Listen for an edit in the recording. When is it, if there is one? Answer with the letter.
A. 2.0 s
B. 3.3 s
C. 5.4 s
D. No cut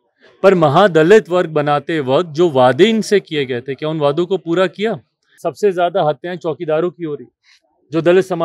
C